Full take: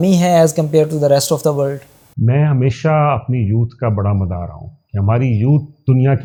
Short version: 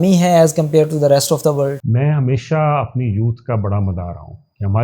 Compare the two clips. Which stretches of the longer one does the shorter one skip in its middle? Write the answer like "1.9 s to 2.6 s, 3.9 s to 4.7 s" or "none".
1.8 s to 2.2 s